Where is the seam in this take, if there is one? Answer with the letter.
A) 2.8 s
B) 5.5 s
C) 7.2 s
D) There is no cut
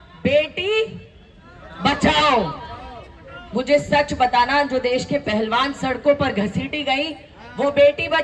D